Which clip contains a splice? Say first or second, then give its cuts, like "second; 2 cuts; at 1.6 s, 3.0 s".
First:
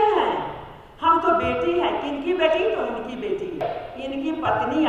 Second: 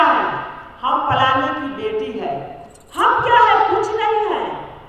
first; 1 cut; at 3.8 s